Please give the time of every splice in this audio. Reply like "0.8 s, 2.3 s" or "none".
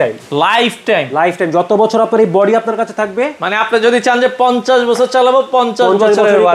none